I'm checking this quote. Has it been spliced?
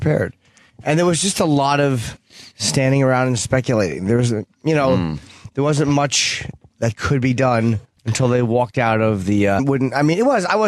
no; 0 cuts

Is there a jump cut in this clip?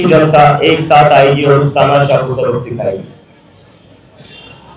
no; 0 cuts

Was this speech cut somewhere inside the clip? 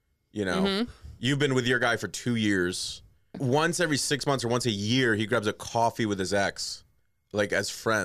yes; 1 cut; at 3.3 s

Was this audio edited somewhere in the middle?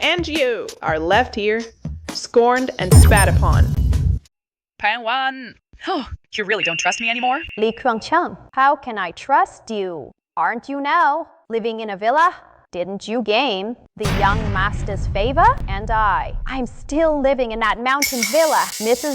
yes; 1 cut; at 4.3 s

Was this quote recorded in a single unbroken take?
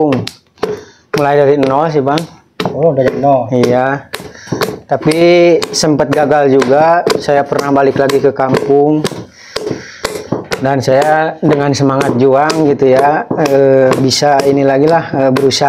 yes; 0 cuts

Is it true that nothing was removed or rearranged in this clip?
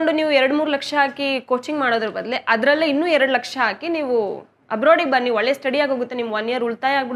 yes; 0 cuts

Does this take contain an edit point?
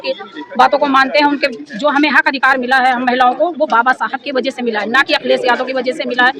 no; 0 cuts

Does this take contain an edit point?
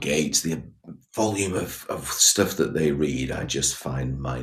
no; 0 cuts

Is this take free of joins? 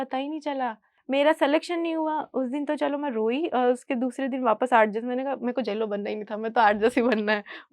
no; 1 cut; at 0.9 s

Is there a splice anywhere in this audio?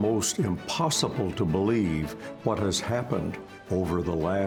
no; 0 cuts

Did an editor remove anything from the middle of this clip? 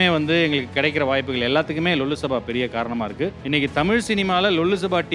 yes; 1 cut; at 3.4 s

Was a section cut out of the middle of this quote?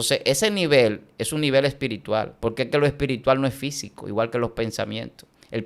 yes; 1 cut; at 2.3 s

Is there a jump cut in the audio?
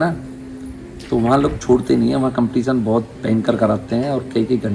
no; 0 cuts

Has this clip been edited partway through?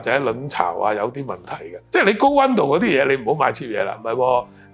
yes; 2 cuts; at 1.7 s, 4.0 s

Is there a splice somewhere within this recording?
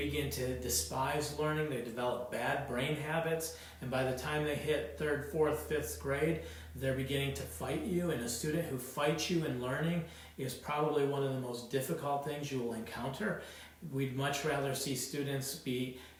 no; 0 cuts

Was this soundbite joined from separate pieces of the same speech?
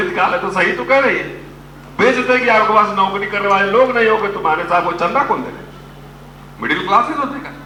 no; 0 cuts

